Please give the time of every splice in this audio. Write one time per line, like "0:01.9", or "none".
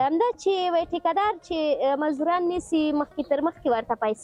none